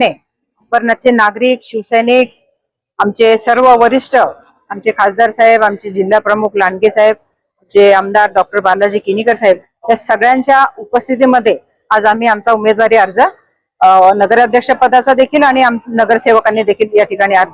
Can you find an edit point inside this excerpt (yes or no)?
no